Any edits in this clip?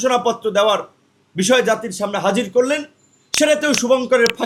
no; 0 cuts

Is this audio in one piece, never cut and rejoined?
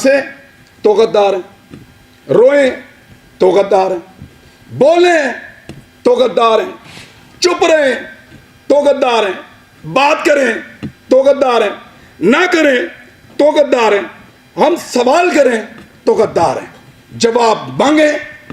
yes; 0 cuts

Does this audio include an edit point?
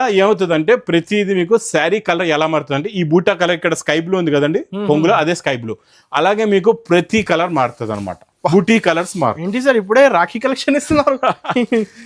no; 0 cuts

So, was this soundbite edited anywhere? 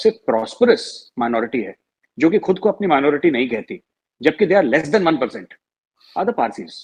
no; 0 cuts

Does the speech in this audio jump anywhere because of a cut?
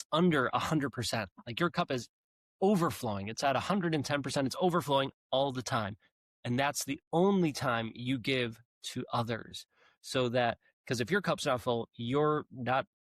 no; 0 cuts

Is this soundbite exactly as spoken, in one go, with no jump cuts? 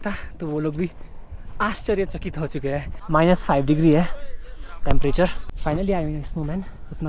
no; 2 cuts; at 2.9 s, 5.5 s

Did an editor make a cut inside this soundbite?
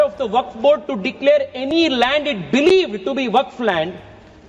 no; 0 cuts

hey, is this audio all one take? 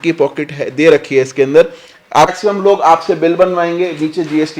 no; 1 cut; at 2.3 s

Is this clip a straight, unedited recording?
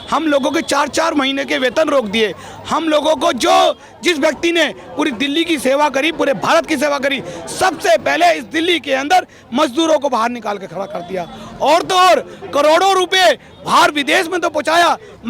yes; 0 cuts

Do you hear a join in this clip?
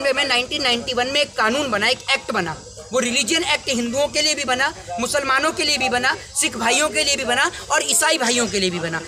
no; 0 cuts

